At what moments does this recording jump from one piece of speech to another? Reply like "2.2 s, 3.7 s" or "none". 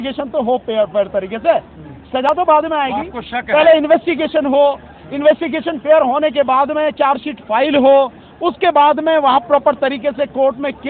none